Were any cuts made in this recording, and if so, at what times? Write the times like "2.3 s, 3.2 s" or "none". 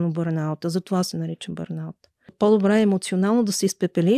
2.3 s

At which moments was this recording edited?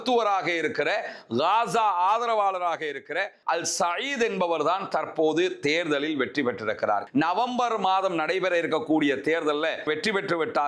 3.3 s, 7.0 s, 9.8 s

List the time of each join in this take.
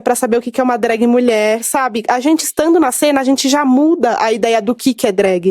none

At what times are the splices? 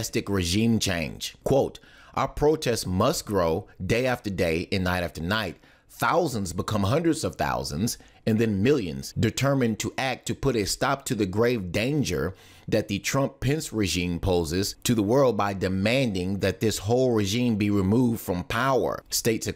13.3 s

